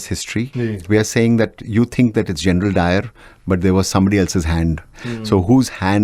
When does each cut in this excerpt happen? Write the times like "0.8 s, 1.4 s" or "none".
0.7 s, 4.9 s